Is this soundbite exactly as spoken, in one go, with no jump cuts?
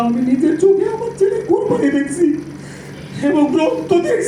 yes; 0 cuts

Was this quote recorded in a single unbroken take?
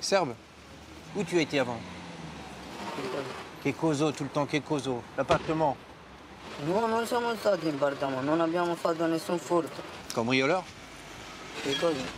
yes; 0 cuts

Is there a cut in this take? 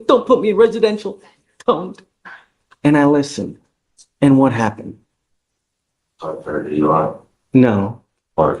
no; 0 cuts

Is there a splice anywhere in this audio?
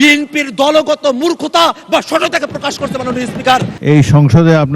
yes; 1 cut; at 3.8 s

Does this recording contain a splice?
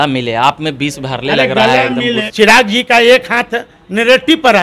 yes; 1 cut; at 2.2 s

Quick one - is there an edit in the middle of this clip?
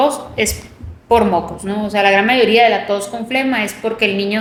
no; 0 cuts

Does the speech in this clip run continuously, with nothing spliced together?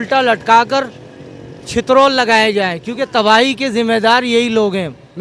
yes; 0 cuts

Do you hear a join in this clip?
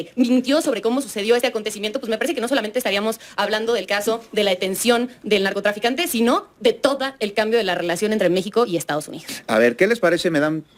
no; 0 cuts

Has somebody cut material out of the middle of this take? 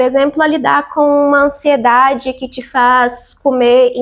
no; 0 cuts

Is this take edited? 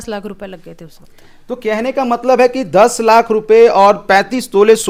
no; 0 cuts

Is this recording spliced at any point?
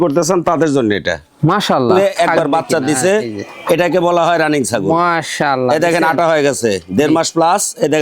yes; 1 cut; at 1.9 s

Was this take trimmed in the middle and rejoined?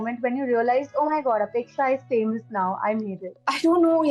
no; 0 cuts

